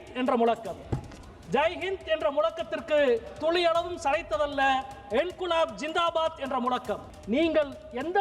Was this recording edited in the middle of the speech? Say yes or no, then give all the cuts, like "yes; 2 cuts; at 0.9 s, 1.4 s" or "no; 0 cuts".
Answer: yes; 1 cut; at 7.1 s